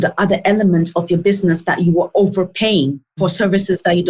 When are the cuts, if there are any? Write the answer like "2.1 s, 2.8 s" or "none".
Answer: 3.2 s